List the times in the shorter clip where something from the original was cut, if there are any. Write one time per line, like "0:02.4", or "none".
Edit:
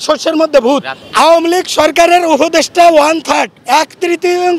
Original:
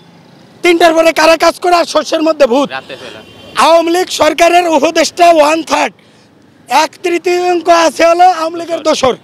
0:01.0
0:03.6